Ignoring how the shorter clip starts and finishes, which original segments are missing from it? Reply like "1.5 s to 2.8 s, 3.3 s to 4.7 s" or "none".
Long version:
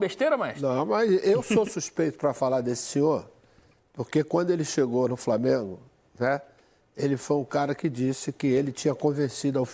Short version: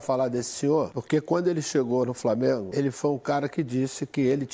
3.3 s to 4.0 s, 5.7 s to 6.9 s